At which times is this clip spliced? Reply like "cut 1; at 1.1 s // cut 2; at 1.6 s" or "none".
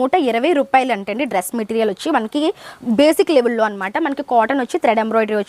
none